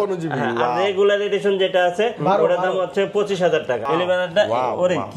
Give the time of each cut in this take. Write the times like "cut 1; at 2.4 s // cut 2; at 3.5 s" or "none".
cut 1; at 3.9 s